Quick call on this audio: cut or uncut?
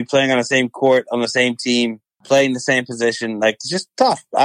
uncut